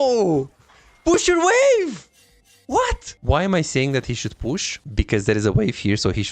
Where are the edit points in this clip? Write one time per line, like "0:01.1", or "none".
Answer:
0:03.1
0:04.8